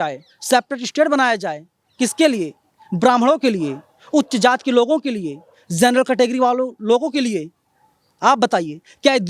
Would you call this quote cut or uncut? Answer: uncut